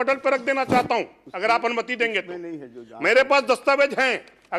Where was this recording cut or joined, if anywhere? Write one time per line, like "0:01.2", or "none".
none